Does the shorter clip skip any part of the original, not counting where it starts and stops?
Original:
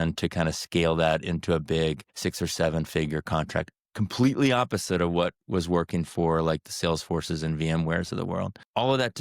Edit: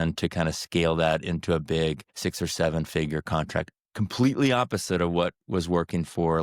no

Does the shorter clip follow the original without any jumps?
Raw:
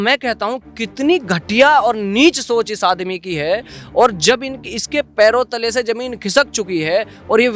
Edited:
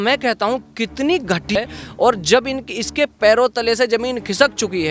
no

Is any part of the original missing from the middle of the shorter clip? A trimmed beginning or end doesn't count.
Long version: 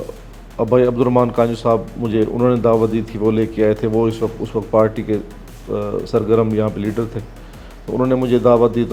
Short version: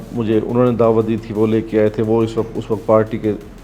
no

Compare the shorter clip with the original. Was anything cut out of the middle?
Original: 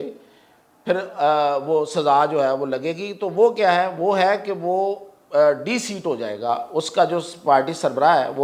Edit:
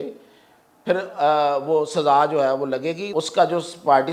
yes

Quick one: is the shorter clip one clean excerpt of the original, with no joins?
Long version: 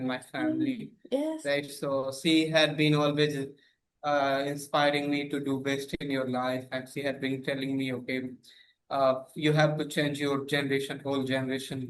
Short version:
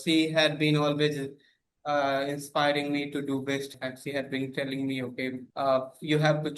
no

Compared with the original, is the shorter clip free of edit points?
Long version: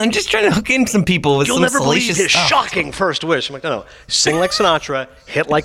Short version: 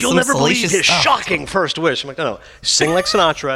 yes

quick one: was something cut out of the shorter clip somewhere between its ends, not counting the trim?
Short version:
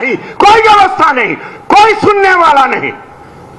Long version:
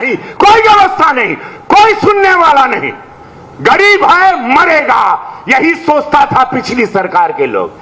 no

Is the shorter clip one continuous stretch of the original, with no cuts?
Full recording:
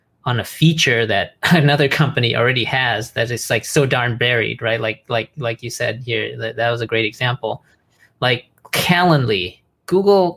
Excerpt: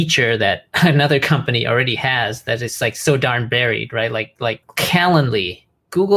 no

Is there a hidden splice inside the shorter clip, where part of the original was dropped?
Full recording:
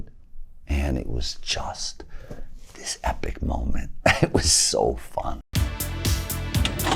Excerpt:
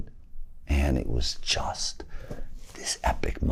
no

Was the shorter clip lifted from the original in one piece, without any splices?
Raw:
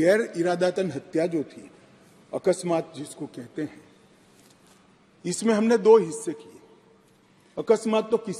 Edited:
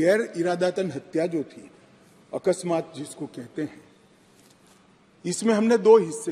yes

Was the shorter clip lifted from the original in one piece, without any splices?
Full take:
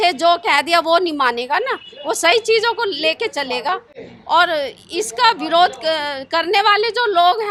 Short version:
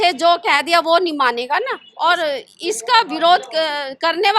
no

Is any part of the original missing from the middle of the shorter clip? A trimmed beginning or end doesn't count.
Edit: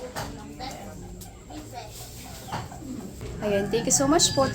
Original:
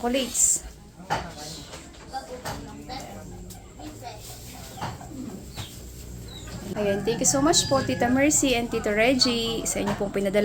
yes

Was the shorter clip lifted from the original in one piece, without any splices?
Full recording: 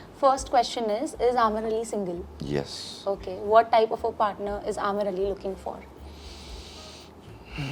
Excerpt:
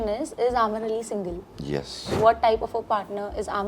no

